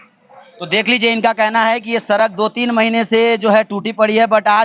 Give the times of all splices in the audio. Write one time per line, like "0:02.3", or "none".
none

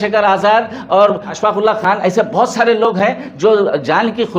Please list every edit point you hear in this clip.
0:01.3

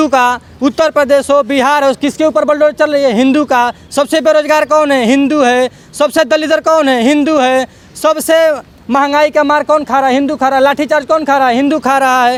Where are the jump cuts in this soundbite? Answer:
none

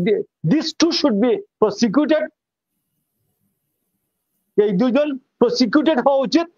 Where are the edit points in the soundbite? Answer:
none

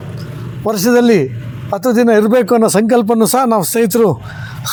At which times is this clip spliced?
none

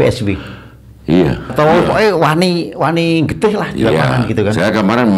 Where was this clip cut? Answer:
0:01.5

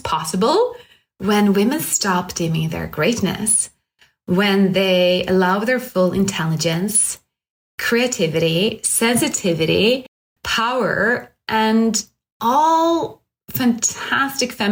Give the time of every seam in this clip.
none

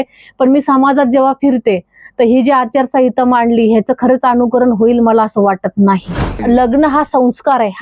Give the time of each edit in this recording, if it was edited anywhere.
0:06.4

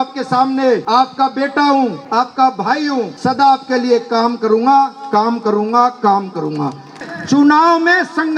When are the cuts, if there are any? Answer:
0:00.8
0:02.0
0:03.1
0:06.9

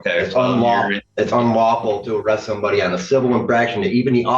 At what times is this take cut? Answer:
0:01.0

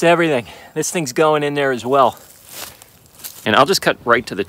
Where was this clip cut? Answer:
0:03.3

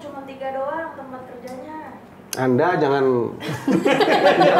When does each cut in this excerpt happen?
0:02.1

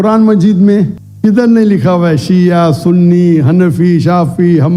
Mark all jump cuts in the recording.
0:01.0

